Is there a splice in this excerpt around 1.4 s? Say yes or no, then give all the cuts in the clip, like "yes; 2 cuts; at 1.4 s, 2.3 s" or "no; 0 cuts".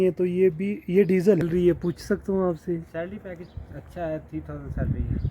yes; 1 cut; at 1.4 s